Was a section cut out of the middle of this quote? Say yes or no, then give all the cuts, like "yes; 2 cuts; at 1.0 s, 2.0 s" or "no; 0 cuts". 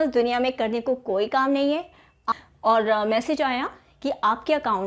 yes; 1 cut; at 2.2 s